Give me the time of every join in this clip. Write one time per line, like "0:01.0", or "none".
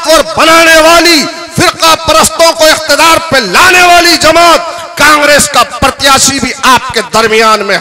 none